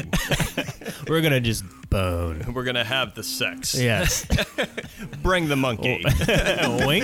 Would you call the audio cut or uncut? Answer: uncut